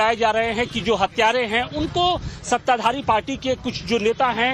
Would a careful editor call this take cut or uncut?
cut